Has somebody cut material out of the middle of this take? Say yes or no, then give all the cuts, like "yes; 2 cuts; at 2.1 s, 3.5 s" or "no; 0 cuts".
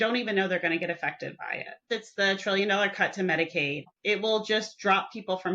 yes; 2 cuts; at 1.8 s, 3.8 s